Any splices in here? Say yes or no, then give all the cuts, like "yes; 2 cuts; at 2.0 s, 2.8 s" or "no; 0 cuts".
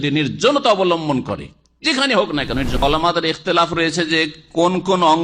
yes; 1 cut; at 2.8 s